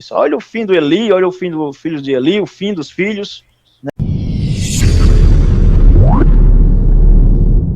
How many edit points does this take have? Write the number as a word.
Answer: one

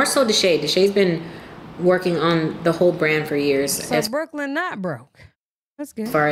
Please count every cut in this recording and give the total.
zero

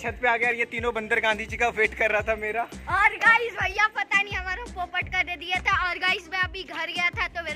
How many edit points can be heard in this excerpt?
zero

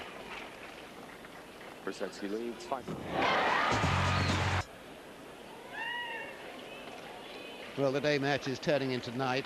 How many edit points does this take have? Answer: one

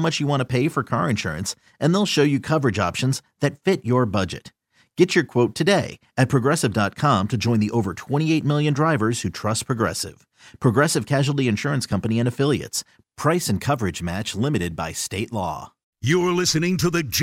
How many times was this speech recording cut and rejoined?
one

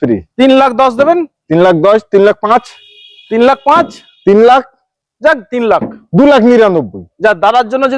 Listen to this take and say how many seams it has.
zero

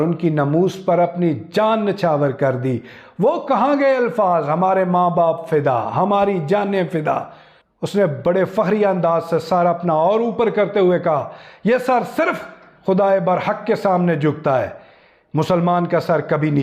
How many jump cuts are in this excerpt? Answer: one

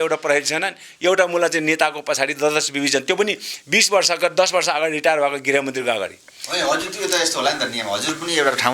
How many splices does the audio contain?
zero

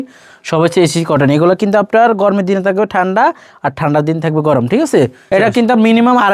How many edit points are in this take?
one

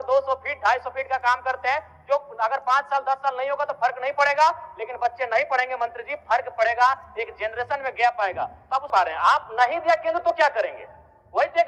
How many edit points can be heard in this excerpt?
one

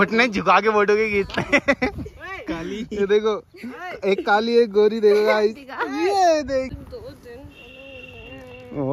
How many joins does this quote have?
one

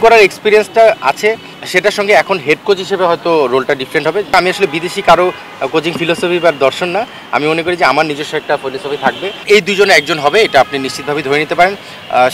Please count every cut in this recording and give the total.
three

